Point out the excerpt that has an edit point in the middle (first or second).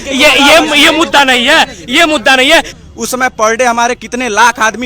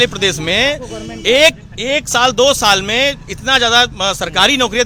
first